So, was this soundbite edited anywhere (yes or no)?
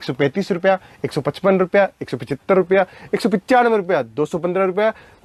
no